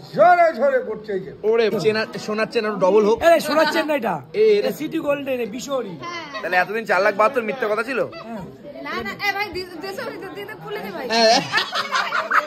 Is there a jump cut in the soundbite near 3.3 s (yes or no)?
no